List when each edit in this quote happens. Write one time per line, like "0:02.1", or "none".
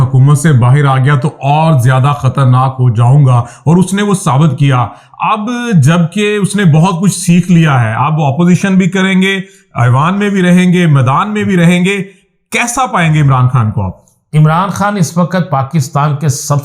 none